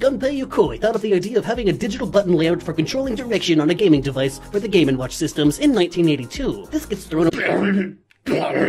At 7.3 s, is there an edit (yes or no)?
no